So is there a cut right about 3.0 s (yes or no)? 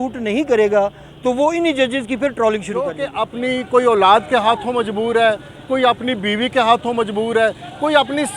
yes